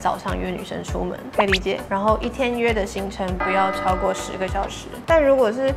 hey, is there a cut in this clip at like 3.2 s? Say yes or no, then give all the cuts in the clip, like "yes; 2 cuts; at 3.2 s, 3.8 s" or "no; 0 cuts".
no; 2 cuts; at 1.9 s, 4.9 s